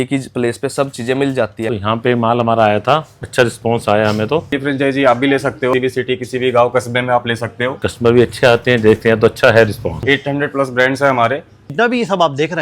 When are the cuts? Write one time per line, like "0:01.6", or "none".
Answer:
0:01.7
0:03.2
0:04.5
0:05.7
0:07.8
0:10.0
0:11.7